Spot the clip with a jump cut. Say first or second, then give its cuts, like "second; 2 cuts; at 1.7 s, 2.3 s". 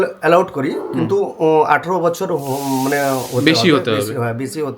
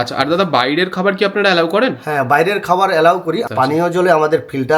second; 1 cut; at 3.4 s